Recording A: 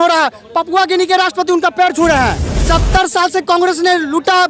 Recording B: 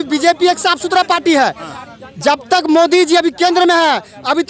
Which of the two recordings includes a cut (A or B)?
A